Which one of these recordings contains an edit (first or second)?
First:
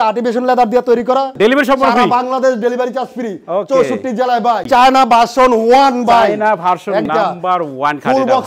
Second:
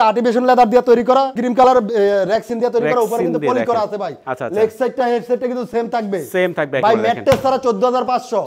first